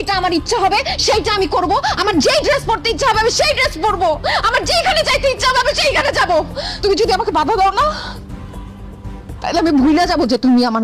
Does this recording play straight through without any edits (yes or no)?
no